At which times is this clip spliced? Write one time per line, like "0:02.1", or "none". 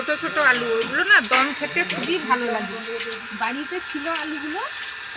none